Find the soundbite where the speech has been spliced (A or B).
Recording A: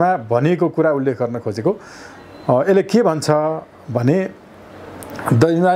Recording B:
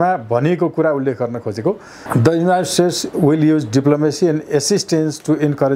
B